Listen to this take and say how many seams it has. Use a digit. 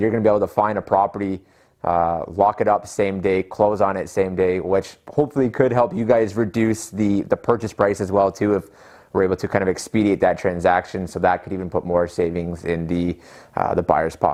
0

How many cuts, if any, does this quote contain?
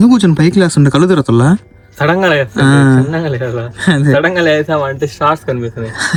0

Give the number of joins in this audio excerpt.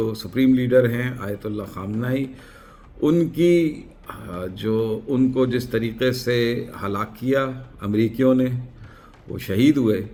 0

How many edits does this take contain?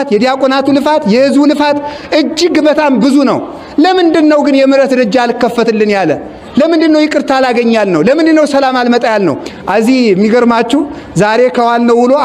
1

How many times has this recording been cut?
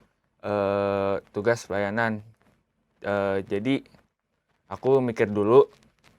0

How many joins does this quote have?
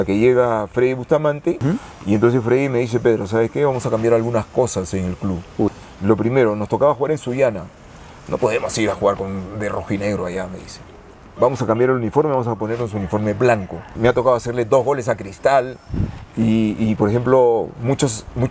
3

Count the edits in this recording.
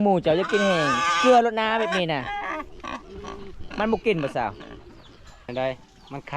1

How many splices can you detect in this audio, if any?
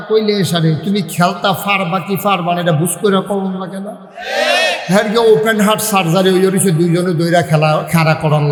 0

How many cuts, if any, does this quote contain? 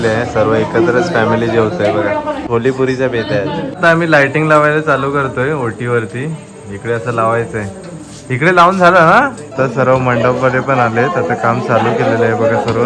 3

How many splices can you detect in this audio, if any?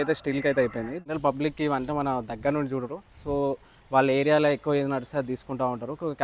1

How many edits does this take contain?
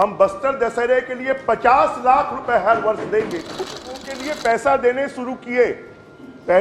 1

